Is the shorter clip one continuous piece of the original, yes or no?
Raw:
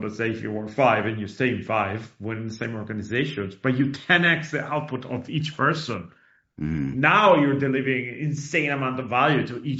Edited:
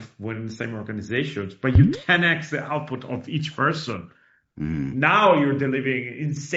yes